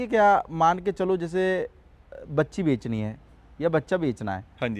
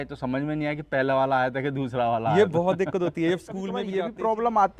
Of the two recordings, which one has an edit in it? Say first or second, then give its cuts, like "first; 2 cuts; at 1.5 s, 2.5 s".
second; 1 cut; at 3.8 s